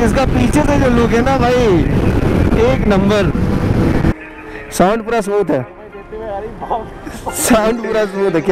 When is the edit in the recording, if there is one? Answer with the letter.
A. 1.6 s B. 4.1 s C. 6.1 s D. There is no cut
B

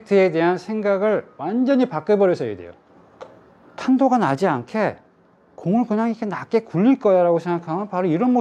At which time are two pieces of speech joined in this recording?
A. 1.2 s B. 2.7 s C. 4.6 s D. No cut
B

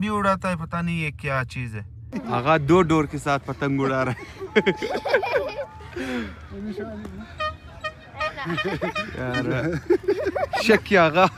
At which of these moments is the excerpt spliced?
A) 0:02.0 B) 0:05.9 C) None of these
A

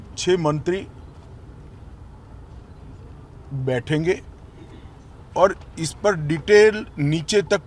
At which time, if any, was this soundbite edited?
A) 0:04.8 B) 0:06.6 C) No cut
C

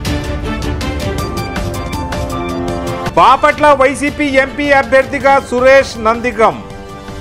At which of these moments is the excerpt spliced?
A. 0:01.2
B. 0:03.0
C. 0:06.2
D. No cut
B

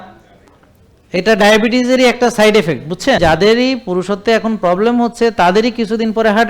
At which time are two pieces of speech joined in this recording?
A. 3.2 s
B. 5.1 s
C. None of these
A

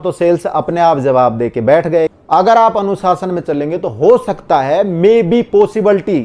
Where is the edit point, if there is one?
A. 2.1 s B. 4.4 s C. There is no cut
A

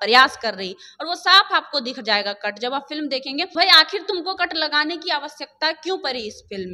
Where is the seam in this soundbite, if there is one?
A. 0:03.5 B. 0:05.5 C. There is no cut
A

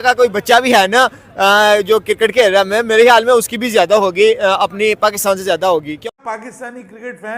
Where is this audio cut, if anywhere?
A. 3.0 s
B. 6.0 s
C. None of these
B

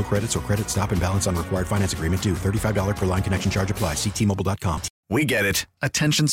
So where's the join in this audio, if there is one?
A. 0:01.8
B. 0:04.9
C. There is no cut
B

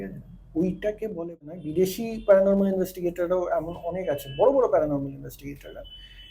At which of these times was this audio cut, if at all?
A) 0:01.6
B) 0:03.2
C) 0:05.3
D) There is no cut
A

